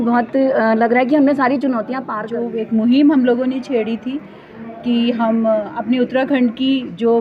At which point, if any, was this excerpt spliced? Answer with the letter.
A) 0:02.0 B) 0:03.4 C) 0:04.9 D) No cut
A